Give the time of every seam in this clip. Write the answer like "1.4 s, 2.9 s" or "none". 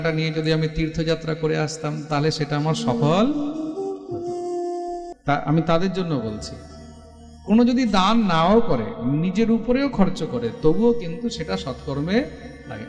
5.1 s